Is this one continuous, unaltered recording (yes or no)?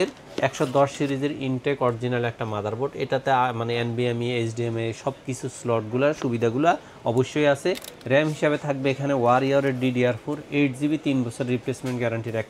yes